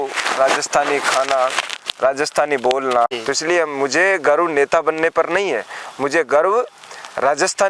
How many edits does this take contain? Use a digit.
1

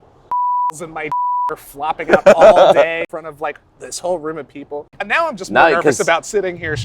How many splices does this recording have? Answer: 2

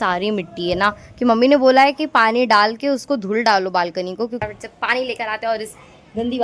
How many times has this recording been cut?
1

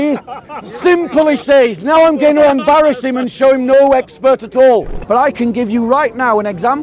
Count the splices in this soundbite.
1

